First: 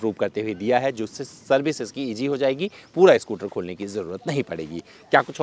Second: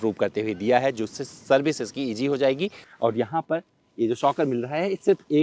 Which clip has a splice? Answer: second; 1 cut; at 2.8 s

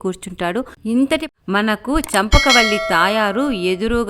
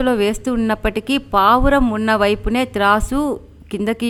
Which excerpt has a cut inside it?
first; 1 cut; at 1.3 s

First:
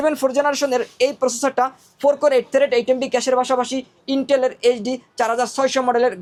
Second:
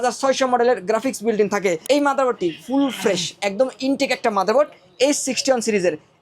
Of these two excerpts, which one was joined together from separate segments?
second; 1 cut; at 1.8 s

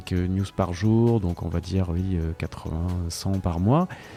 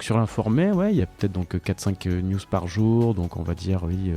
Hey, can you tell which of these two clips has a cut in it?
second; 1 cut; at 1.0 s

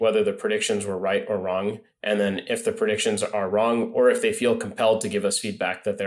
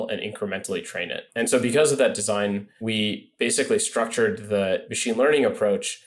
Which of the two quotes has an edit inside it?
second; 3 cuts; at 1.2 s, 2.7 s, 4.9 s

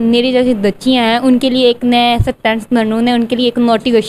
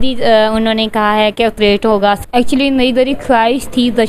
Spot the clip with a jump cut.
second; 1 cut; at 2.2 s

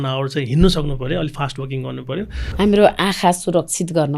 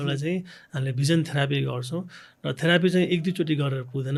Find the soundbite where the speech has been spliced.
first; 1 cut; at 2.4 s

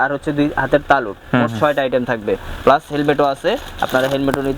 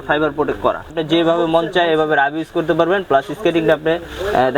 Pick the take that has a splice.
second; 1 cut; at 0.9 s

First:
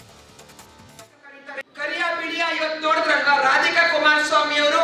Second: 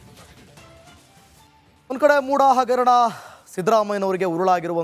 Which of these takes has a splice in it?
second; 1 cut; at 1.5 s

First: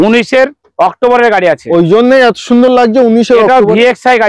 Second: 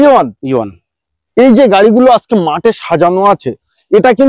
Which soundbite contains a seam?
second; 1 cut; at 1.1 s

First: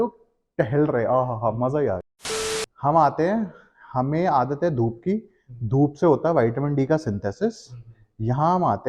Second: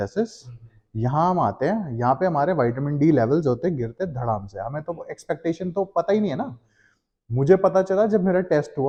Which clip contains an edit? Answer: first; 1 cut; at 2.1 s

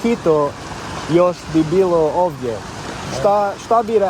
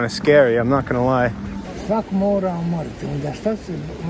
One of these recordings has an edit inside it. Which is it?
second; 1 cut; at 1.6 s

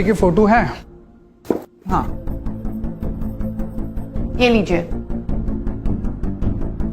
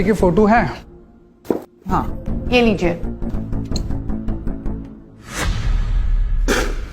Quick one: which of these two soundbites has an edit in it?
second; 2 cuts; at 2.2 s, 3.3 s

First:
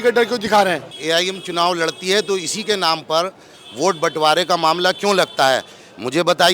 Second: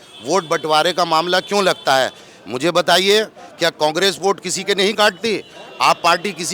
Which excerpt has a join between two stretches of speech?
first; 1 cut; at 0.9 s

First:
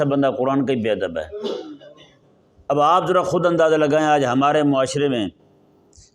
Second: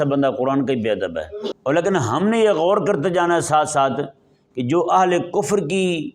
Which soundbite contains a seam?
second; 1 cut; at 1.4 s

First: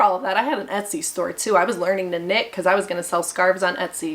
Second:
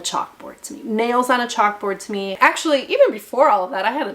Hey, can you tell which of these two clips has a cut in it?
second; 1 cut; at 2.3 s

